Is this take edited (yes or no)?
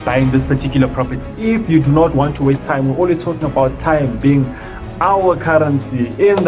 yes